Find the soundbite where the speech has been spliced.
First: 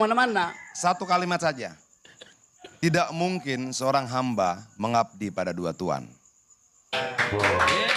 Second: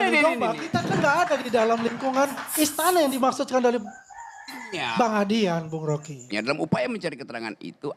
second; 1 cut; at 6.2 s

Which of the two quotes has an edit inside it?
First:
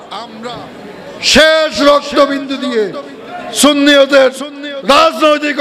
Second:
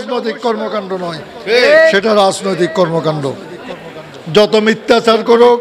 second; 1 cut; at 3.7 s

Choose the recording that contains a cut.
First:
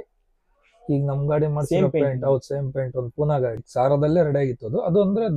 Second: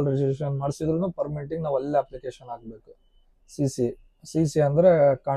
first; 1 cut; at 3.6 s

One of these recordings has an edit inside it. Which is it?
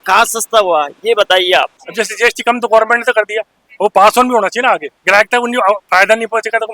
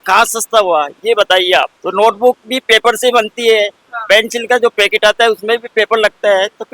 first; 2 cuts; at 1.8 s, 4.9 s

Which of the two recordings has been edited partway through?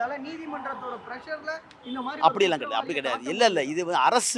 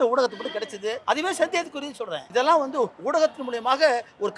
second; 2 cuts; at 1.0 s, 2.2 s

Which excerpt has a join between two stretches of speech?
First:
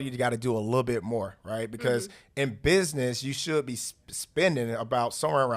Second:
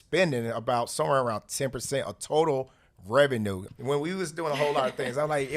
second; 1 cut; at 3.7 s

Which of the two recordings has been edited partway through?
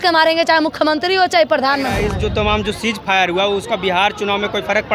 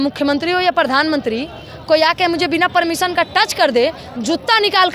first; 1 cut; at 2.1 s

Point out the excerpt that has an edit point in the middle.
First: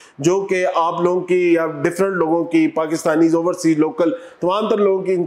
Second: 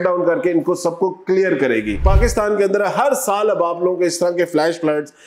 second; 1 cut; at 2.0 s

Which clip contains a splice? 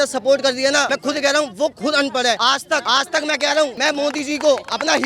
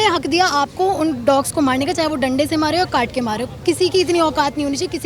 first; 3 cuts; at 0.9 s, 2.6 s, 3.8 s

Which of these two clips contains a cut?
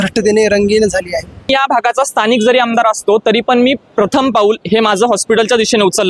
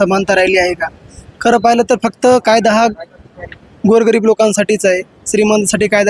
first; 1 cut; at 1.5 s

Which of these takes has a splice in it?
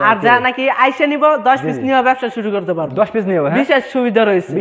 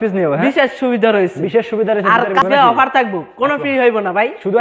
second; 1 cut; at 2.4 s

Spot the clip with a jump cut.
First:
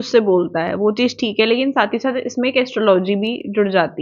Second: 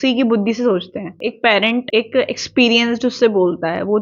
second; 2 cuts; at 1.1 s, 1.9 s

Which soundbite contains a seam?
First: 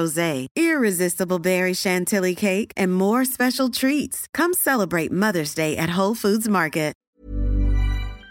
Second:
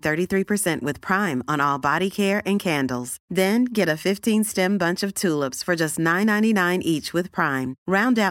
first; 1 cut; at 7.1 s

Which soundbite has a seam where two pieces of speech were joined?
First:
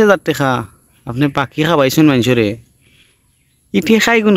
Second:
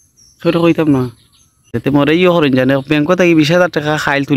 second; 1 cut; at 1.7 s

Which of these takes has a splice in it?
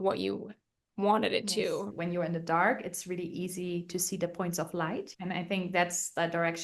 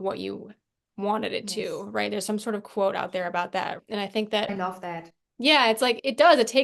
first; 2 cuts; at 1.9 s, 5.0 s

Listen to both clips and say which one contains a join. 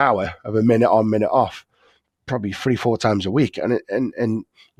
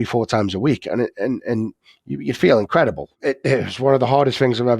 second; 1 cut; at 3.1 s

